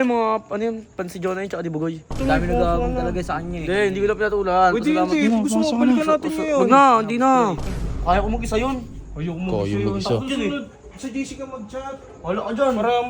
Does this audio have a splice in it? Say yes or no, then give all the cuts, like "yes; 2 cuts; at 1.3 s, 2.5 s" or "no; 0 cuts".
yes; 2 cuts; at 2.2 s, 7.7 s